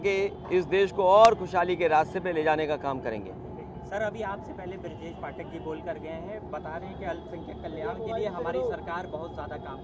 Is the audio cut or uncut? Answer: uncut